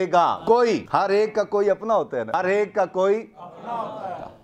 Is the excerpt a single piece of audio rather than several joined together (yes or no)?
yes